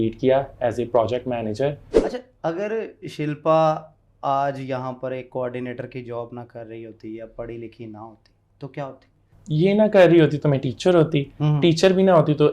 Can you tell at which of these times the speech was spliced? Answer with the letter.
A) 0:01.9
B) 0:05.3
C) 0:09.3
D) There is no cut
A